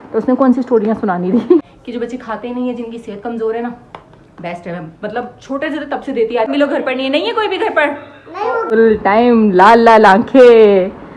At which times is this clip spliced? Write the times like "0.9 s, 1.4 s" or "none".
1.6 s, 6.5 s, 8.7 s